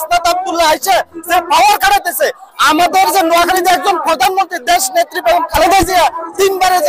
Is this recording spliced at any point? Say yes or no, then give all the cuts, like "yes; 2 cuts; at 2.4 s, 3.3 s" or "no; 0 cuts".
no; 0 cuts